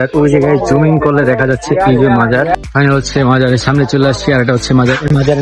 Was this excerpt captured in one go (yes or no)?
no